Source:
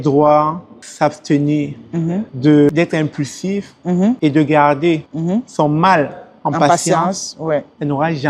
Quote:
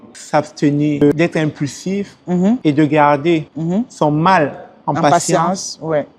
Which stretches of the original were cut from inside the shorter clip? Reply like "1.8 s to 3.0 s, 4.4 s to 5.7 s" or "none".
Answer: 1.7 s to 2.6 s